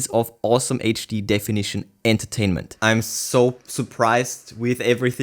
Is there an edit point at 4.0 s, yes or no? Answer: no